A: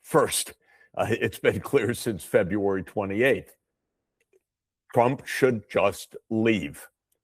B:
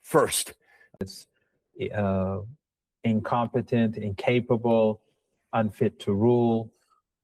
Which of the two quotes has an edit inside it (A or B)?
B